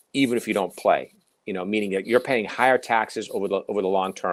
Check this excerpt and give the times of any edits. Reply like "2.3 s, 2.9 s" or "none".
none